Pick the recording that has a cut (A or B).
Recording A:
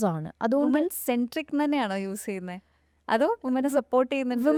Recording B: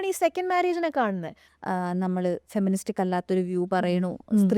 B